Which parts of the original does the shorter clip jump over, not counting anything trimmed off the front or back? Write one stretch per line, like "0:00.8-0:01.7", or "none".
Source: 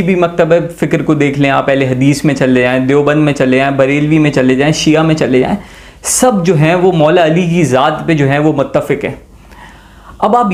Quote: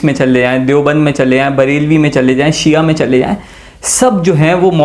none